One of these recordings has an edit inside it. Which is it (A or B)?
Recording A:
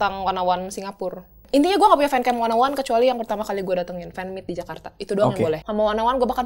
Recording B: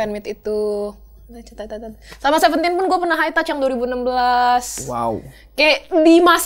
A